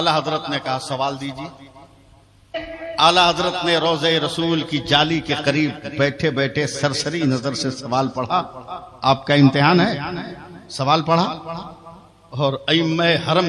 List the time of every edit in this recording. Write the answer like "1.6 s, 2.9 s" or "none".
2.7 s